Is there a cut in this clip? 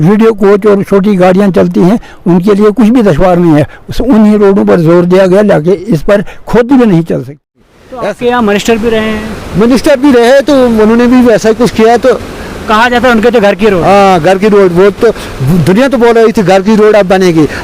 yes; 1 cut; at 7.4 s

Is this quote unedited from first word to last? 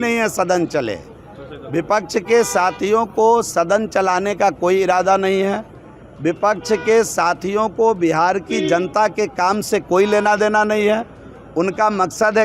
yes; 0 cuts

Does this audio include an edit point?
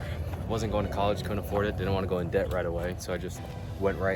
no; 0 cuts

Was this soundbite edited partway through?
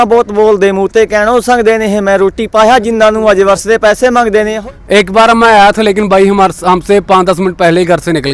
yes; 1 cut; at 4.5 s

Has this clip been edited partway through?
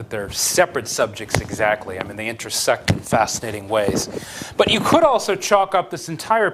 no; 0 cuts

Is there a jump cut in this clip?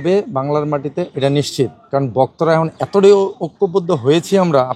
no; 0 cuts

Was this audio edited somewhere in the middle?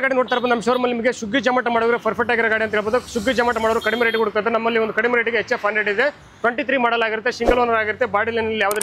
no; 0 cuts

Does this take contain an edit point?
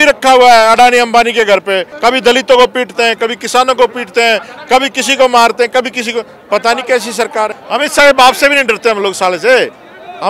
yes; 2 cuts; at 1.9 s, 7.6 s

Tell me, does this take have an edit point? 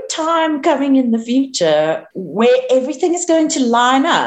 yes; 1 cut; at 2.1 s

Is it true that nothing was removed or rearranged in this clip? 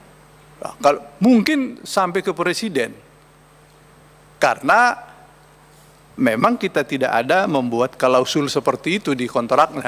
yes; 0 cuts

